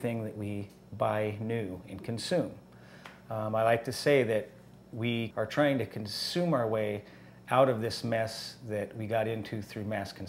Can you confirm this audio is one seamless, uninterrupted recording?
no; 1 cut; at 5.3 s

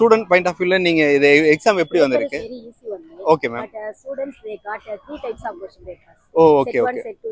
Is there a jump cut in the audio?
no; 0 cuts

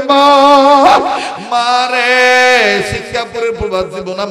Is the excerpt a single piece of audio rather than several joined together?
yes; 0 cuts

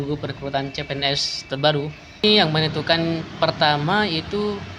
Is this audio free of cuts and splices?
no; 1 cut; at 2.2 s

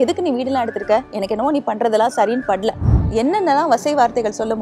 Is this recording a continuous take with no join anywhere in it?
no; 1 cut; at 2.9 s

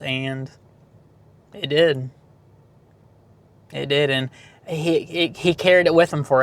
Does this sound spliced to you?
no; 0 cuts

